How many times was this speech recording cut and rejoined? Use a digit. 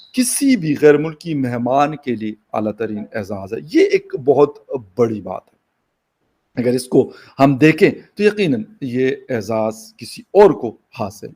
0